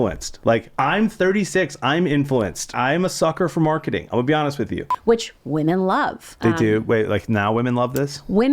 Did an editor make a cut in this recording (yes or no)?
yes